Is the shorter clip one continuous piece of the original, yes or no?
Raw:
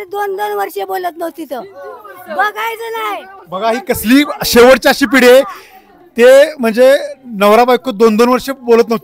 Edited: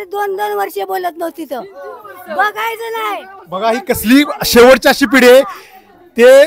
yes